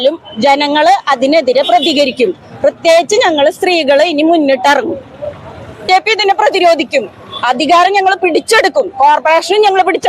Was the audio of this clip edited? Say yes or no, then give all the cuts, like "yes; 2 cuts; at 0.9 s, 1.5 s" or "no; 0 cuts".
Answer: yes; 1 cut; at 5.8 s